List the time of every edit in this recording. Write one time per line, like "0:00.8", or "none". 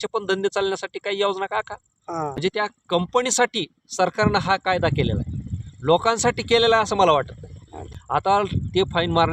0:02.3
0:07.9